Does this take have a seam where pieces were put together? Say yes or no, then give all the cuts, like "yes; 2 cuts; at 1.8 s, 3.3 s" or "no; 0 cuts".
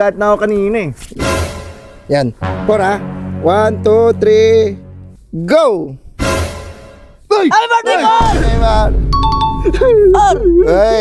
no; 0 cuts